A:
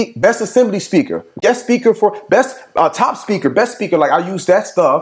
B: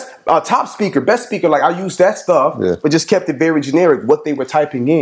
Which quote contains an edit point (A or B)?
A